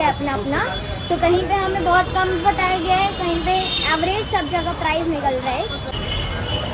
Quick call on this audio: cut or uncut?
uncut